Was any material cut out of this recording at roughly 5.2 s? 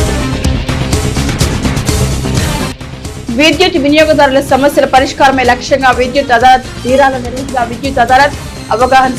no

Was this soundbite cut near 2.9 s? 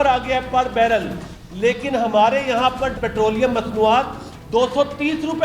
yes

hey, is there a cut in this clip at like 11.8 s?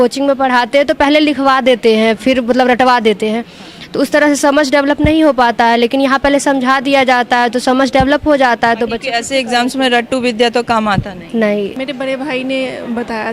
yes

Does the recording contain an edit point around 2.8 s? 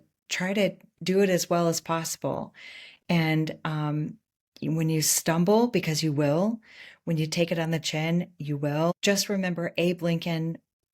no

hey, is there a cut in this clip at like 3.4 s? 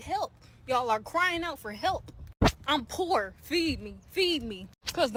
no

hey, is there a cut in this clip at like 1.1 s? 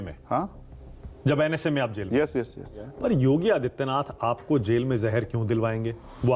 no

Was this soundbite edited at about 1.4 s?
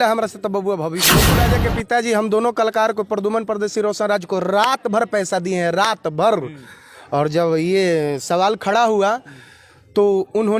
yes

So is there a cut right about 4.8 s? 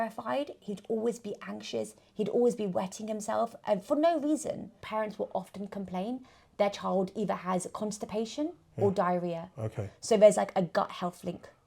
yes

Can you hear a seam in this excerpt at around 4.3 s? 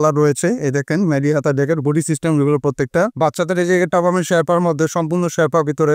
no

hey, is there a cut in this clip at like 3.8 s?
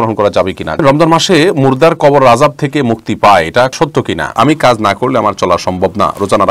yes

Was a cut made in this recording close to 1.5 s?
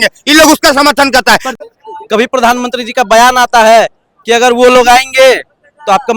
yes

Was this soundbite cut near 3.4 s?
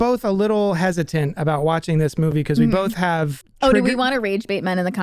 yes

